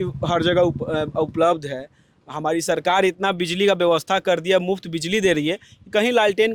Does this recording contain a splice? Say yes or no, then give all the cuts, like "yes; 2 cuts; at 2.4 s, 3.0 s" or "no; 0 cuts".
no; 0 cuts